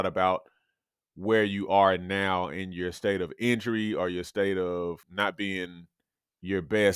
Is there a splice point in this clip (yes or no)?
yes